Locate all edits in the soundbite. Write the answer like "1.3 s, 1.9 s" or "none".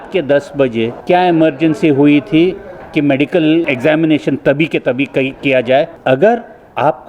1.0 s, 3.6 s, 5.9 s